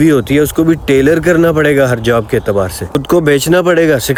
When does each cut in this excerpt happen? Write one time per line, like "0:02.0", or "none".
none